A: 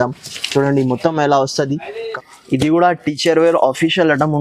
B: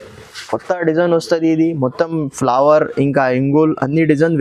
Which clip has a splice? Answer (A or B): A